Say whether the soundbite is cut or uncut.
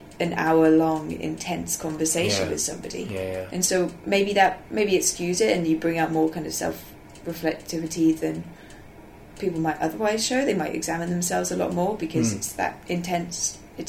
uncut